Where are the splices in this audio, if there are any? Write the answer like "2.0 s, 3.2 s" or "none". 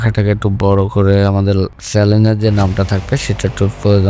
1.8 s